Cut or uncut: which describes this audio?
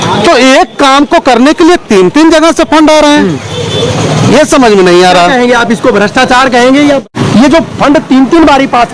uncut